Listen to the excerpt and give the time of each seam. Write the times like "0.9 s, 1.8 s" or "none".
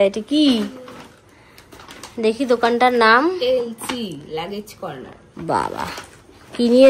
none